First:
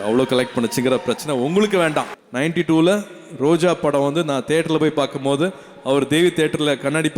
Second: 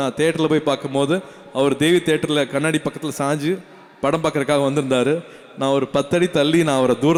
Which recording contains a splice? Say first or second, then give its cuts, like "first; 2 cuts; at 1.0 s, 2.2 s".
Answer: first; 1 cut; at 2.2 s